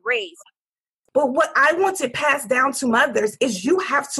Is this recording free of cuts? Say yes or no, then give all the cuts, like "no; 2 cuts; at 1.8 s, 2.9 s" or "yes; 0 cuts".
no; 1 cut; at 1.0 s